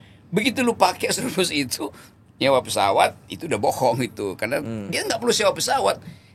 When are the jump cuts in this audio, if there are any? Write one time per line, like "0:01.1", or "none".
none

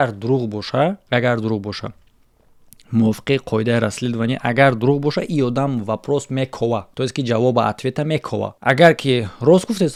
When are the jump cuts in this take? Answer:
none

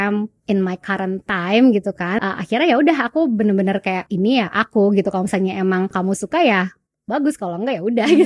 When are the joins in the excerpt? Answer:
0:02.1
0:04.1
0:05.9

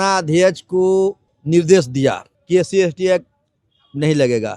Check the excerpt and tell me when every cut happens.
0:01.3
0:02.3

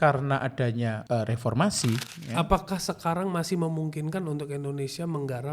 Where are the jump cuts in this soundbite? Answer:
0:01.0
0:02.2

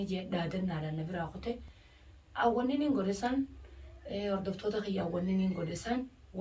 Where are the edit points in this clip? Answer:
none

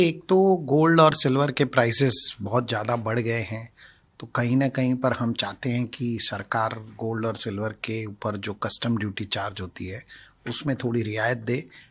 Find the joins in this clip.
none

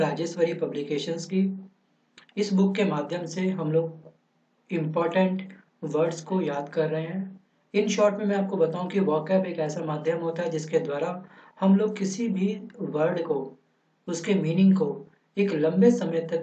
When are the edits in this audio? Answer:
0:13.8

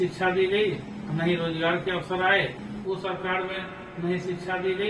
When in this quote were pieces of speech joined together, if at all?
0:02.7

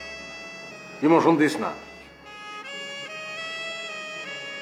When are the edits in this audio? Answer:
0:02.2

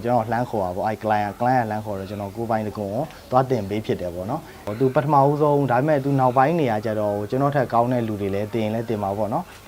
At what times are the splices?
0:04.6

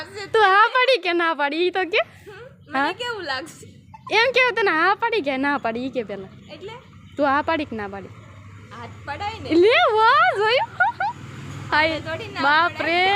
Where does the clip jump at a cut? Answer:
none

